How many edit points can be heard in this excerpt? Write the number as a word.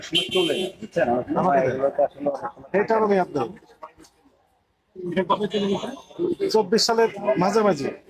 zero